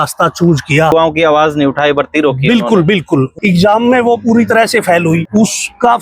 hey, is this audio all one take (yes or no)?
no